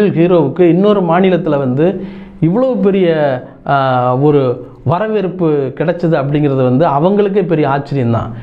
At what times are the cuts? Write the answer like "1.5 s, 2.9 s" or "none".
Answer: none